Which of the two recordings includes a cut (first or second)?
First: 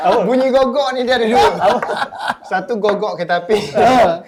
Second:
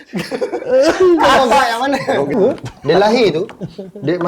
second